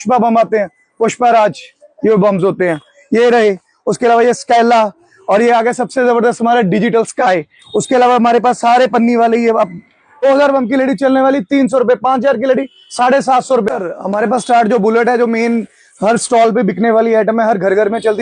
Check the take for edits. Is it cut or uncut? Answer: cut